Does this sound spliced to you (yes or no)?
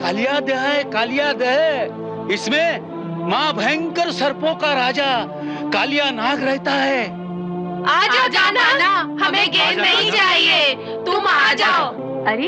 no